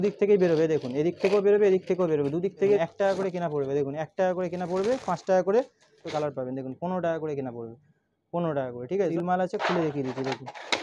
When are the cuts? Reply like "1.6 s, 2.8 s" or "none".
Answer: 2.8 s, 6.0 s, 9.1 s